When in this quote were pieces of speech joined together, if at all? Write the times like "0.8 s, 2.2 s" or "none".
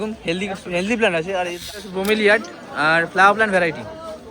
1.7 s